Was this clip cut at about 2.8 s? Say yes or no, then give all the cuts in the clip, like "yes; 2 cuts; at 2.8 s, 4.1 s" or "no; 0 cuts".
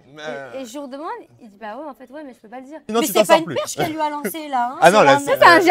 yes; 1 cut; at 2.8 s